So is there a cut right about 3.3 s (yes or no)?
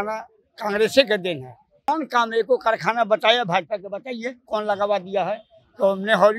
no